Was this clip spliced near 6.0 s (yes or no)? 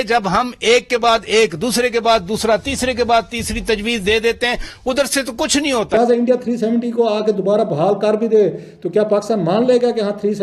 yes